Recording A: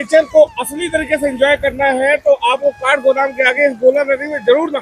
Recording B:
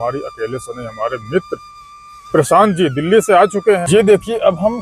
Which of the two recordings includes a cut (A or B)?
B